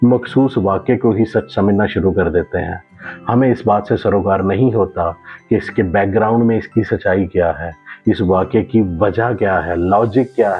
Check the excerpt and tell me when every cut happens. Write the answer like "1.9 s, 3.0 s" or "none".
none

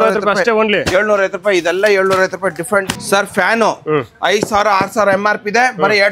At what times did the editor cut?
3.0 s

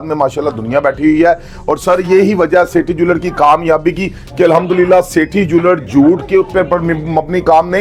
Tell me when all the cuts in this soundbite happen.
none

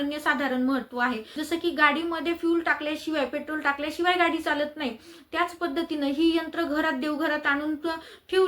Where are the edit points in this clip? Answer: 1.3 s

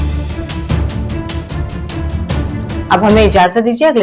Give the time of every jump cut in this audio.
none

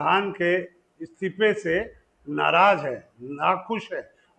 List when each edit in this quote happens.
none

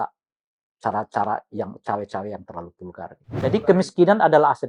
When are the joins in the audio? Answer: 3.4 s

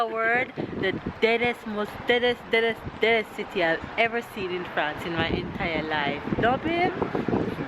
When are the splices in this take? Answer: none

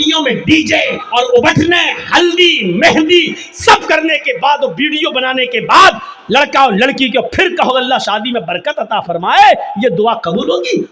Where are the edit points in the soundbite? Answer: 1.0 s

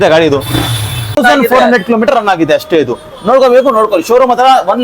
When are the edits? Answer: 1.2 s

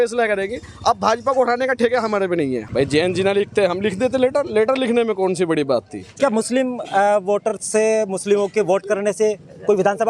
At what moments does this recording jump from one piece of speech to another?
2.6 s, 6.1 s

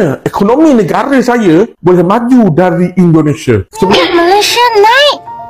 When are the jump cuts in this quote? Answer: 3.9 s

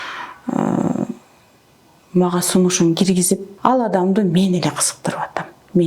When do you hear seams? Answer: 3.5 s

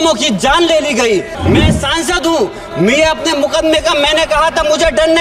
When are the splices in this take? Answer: 1.3 s

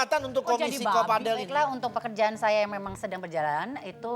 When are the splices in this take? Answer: 1.5 s

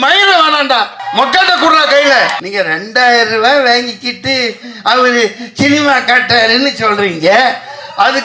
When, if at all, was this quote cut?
1.0 s, 2.4 s

